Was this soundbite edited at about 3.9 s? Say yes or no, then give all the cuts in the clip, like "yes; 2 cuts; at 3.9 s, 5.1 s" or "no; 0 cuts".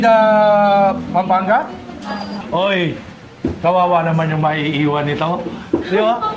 no; 1 cut; at 2.4 s